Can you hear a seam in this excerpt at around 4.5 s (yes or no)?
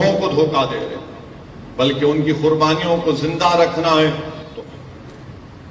yes